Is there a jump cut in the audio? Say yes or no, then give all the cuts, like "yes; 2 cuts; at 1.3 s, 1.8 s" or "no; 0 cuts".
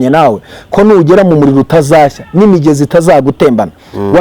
no; 0 cuts